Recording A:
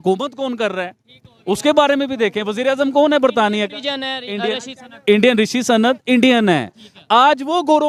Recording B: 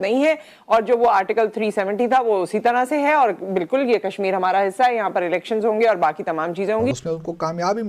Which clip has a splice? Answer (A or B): B